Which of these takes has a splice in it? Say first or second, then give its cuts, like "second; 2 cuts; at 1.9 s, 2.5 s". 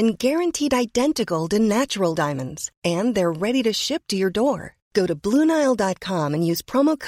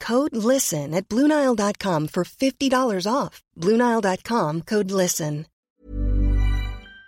second; 1 cut; at 5.7 s